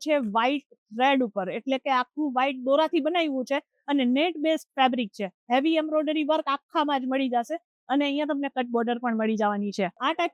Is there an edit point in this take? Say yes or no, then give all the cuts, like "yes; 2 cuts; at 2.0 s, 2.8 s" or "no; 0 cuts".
no; 0 cuts